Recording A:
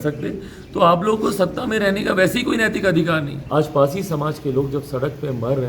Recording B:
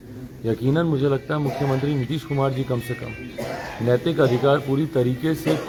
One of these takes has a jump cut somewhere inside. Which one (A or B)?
A